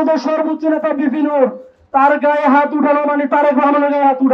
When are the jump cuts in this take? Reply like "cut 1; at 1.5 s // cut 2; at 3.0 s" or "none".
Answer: none